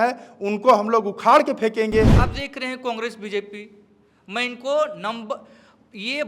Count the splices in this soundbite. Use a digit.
1